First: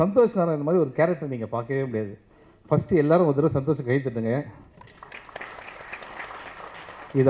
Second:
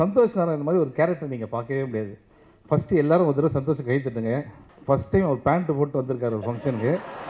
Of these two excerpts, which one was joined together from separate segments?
second; 1 cut; at 4.7 s

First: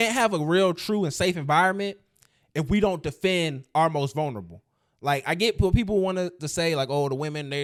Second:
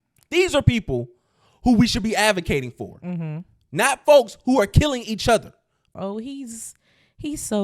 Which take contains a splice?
second; 1 cut; at 5.8 s

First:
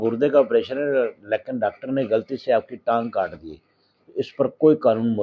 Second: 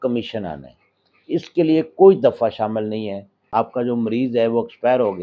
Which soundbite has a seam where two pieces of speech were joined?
second; 1 cut; at 3.5 s

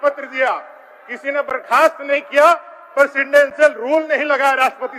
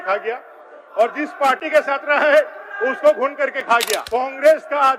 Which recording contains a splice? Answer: second; 1 cut; at 4.0 s

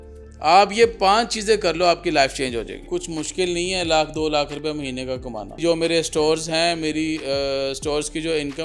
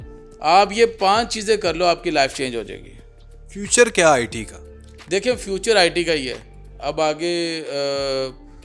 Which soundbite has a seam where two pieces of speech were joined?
first; 2 cuts; at 2.9 s, 5.6 s

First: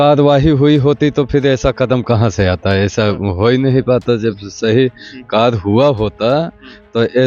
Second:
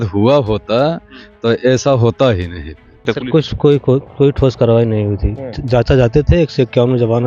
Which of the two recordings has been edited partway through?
second; 1 cut; at 3.1 s

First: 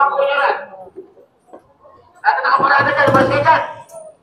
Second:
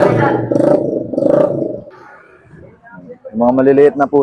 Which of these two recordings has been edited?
second; 1 cut; at 1.9 s

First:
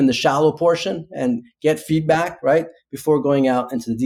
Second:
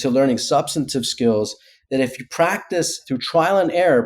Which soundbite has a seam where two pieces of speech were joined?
second; 1 cut; at 3.0 s

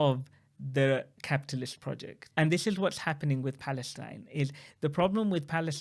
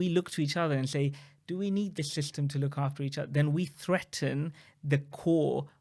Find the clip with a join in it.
first; 1 cut; at 2.1 s

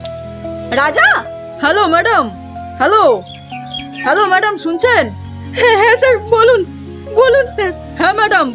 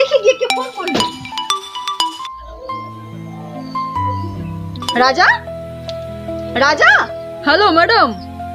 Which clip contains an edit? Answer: second; 1 cut; at 4.9 s

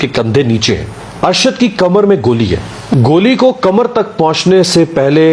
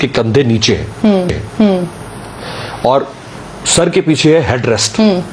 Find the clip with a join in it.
first; 2 cuts; at 0.9 s, 2.8 s

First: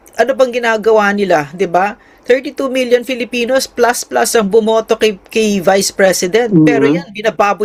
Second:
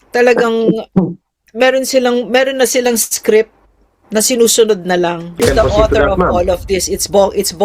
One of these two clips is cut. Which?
second; 1 cut; at 5.4 s

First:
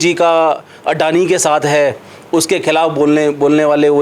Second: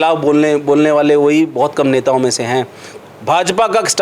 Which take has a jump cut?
second; 1 cut; at 2.8 s

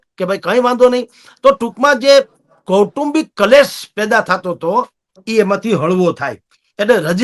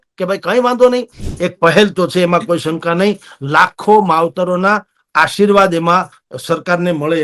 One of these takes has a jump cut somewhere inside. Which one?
second; 1 cut; at 1.2 s

